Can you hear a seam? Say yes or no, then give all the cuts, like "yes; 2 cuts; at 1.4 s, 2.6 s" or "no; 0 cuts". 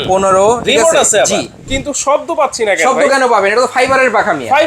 yes; 1 cut; at 1.7 s